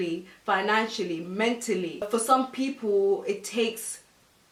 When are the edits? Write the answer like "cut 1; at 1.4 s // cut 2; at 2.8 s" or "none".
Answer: none